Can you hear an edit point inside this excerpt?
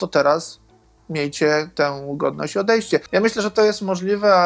yes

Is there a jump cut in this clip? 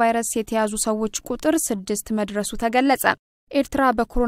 no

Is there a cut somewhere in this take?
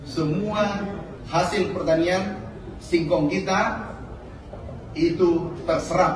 no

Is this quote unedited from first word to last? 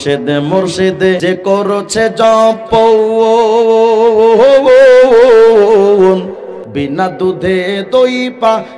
no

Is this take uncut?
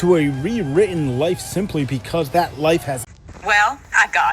no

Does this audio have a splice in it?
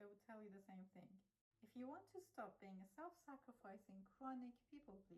yes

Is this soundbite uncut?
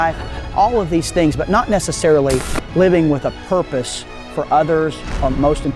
yes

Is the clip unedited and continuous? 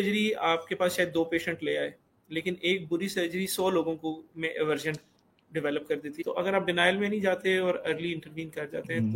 no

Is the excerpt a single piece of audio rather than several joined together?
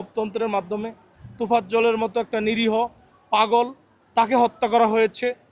yes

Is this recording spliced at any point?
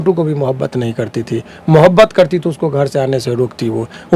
no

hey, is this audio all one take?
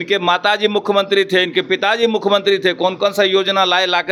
yes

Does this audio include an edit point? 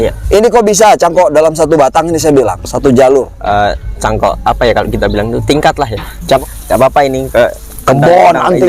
yes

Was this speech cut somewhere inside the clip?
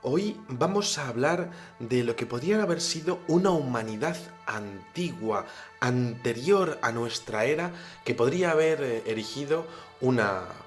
yes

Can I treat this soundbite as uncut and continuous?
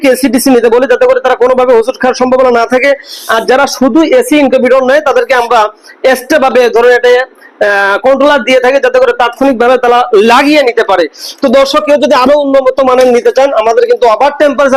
yes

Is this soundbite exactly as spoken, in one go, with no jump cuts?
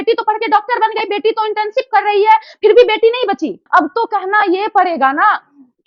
no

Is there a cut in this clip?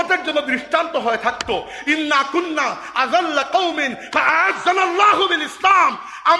no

